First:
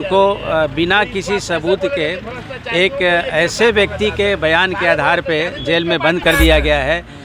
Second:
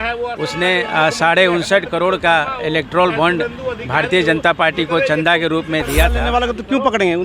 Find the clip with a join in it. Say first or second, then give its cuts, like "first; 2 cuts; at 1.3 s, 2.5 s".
second; 1 cut; at 6.2 s